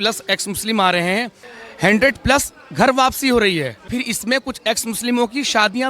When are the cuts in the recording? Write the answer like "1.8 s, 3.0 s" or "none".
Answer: 1.7 s, 3.9 s